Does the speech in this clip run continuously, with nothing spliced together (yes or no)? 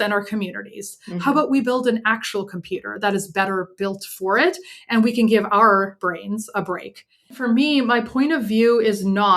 no